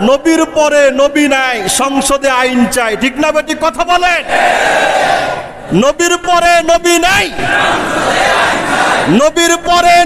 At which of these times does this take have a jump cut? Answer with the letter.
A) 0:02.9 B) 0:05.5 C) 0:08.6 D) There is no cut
B